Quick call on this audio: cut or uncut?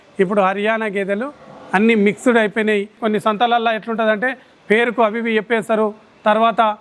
cut